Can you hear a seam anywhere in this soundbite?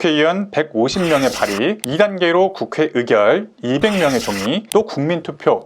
no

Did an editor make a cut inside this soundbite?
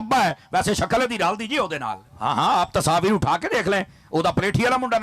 yes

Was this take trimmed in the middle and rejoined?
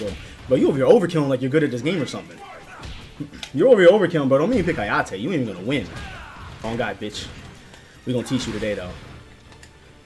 yes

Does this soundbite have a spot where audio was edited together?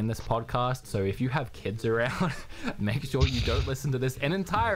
no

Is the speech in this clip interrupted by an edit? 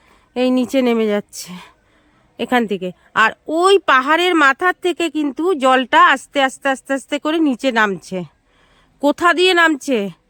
no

